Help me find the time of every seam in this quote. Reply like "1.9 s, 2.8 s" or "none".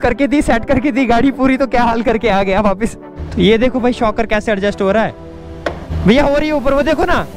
3.1 s, 5.9 s